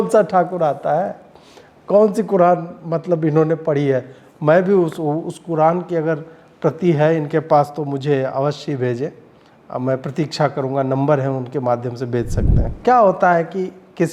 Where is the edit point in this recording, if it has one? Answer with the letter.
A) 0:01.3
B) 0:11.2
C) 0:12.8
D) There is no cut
C